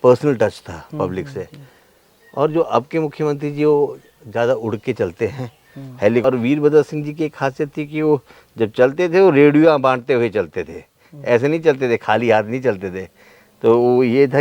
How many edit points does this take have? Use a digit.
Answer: 1